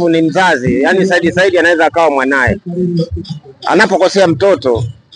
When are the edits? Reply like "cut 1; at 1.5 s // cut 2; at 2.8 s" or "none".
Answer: none